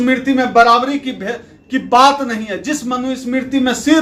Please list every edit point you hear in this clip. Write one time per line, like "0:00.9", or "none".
none